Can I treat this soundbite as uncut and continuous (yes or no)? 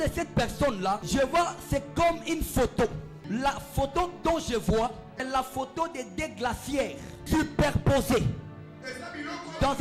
no